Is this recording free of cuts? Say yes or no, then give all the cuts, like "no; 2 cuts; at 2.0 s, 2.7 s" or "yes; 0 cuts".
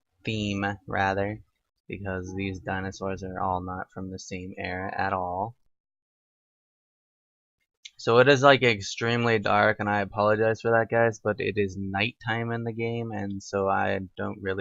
no; 1 cut; at 10.6 s